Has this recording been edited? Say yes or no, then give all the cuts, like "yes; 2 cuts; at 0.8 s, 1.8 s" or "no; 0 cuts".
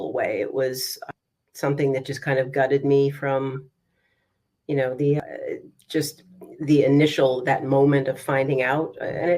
yes; 2 cuts; at 0.9 s, 5.2 s